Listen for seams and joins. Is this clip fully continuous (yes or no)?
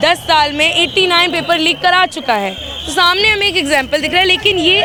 yes